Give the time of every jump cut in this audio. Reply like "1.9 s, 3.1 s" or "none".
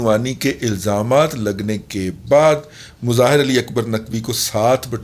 none